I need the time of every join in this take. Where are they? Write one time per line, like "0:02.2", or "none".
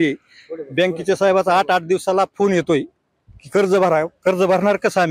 none